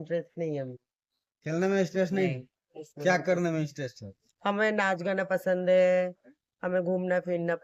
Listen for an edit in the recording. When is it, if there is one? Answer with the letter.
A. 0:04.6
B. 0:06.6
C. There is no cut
C